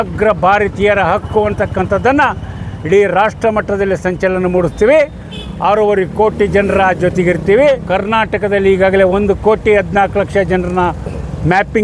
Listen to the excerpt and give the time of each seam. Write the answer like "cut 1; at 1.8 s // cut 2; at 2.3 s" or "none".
cut 1; at 7.8 s